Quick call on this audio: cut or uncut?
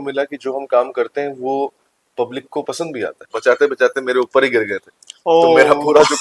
cut